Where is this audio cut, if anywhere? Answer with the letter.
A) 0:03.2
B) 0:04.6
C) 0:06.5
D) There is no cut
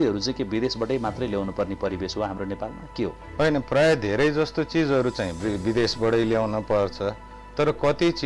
A